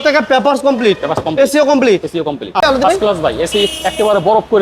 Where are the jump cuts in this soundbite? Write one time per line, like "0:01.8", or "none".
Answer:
0:02.6